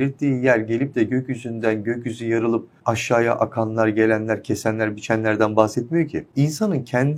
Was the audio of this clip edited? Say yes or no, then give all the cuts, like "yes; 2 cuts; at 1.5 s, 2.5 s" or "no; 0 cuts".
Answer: yes; 2 cuts; at 2.7 s, 6.2 s